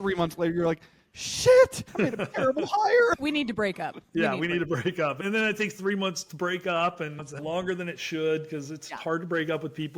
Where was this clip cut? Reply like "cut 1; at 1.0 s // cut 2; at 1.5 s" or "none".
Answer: cut 1; at 1.8 s // cut 2; at 3.2 s // cut 3; at 5.2 s // cut 4; at 7.4 s